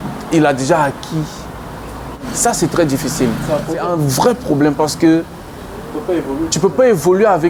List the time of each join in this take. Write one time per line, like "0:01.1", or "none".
0:02.2
0:03.9